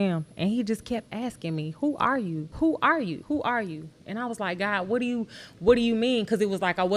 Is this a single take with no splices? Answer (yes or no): no